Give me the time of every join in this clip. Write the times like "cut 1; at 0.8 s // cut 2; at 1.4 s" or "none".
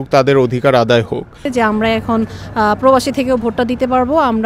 cut 1; at 1.5 s